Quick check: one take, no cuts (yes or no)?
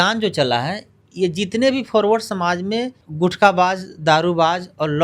no